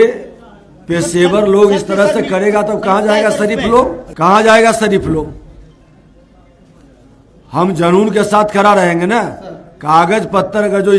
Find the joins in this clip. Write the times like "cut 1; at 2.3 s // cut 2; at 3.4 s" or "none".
cut 1; at 4.0 s

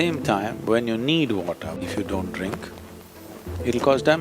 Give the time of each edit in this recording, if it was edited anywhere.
cut 1; at 1.8 s

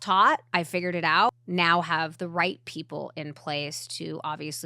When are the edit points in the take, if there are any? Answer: cut 1; at 1.0 s

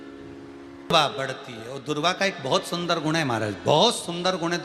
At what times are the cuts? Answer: cut 1; at 0.9 s

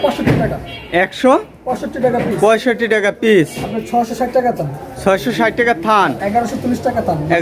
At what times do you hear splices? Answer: cut 1; at 6.2 s

